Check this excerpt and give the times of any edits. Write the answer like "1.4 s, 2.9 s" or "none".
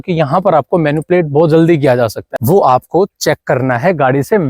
2.3 s